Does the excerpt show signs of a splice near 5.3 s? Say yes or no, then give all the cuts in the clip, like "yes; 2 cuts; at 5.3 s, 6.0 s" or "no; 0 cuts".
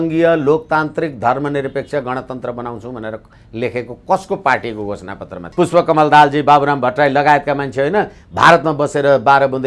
yes; 1 cut; at 5.3 s